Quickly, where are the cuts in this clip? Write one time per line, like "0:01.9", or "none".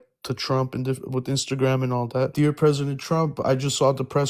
0:02.3

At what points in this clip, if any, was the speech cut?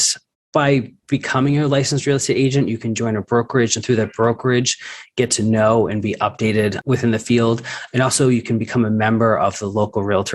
0:01.0
0:06.8

